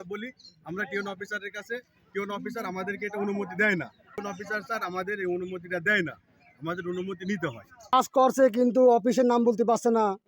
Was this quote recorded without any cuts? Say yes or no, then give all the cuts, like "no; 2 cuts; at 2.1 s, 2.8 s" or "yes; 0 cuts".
no; 2 cuts; at 4.2 s, 7.9 s